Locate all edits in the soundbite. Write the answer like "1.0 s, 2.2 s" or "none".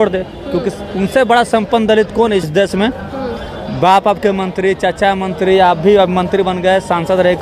2.5 s